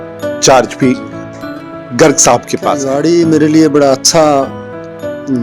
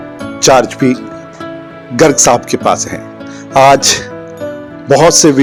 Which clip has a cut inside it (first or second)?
first